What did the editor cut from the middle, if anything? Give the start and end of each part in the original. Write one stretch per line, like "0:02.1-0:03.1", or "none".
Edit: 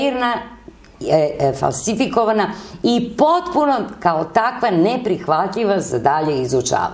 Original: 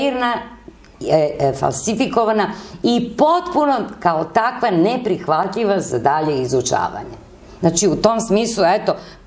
none